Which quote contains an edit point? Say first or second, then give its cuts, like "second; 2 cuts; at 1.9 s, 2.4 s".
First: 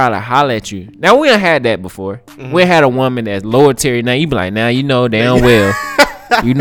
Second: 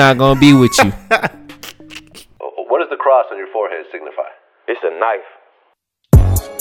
second; 1 cut; at 2.3 s